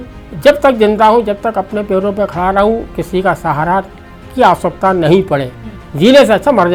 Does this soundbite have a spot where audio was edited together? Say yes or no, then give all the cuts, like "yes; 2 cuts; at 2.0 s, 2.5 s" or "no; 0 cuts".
no; 0 cuts